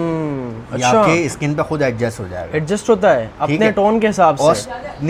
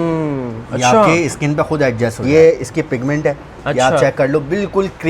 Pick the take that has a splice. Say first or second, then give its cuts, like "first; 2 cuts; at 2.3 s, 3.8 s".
second; 1 cut; at 2.2 s